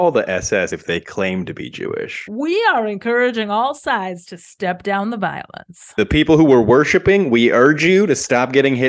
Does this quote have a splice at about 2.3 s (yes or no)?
yes